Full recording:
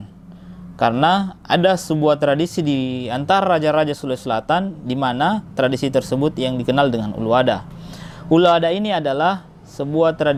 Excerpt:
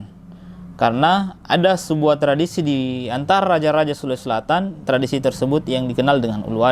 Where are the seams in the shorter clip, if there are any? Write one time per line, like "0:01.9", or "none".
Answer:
0:04.8